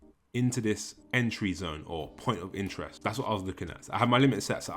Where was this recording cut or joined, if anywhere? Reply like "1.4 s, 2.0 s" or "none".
0.9 s, 2.9 s